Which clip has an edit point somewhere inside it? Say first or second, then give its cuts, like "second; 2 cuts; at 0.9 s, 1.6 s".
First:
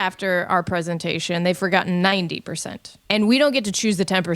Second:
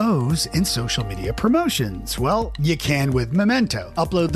first; 1 cut; at 3.0 s